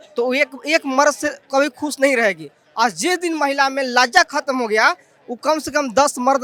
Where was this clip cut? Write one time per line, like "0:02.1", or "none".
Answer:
none